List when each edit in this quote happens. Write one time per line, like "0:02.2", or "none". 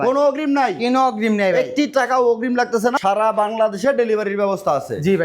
0:03.0